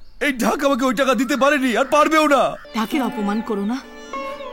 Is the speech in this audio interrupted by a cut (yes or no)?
yes